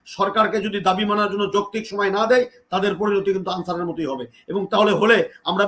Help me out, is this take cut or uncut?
uncut